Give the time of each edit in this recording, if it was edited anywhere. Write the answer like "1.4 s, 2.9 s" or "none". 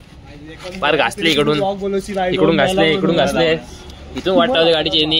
none